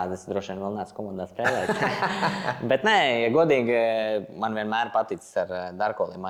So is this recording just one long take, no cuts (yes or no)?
yes